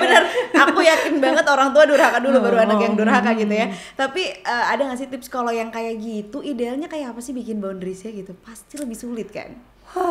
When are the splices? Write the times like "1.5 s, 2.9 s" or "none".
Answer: none